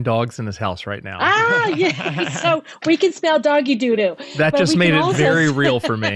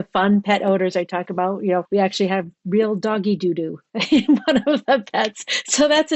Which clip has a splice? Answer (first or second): second